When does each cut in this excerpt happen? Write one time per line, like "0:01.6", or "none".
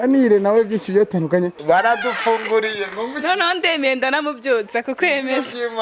0:01.6